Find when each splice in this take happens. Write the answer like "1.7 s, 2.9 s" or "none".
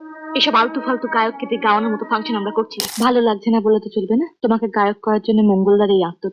2.9 s, 4.3 s